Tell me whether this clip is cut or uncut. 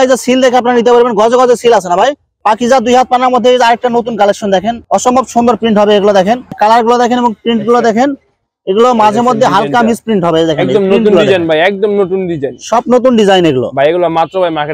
cut